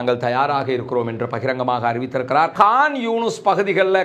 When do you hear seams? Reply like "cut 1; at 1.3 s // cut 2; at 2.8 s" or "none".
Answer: cut 1; at 2.5 s